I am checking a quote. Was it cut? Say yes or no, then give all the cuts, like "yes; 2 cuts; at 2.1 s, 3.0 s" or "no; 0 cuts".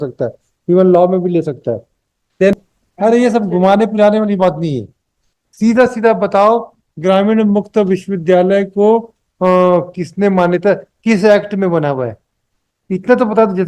yes; 1 cut; at 2.5 s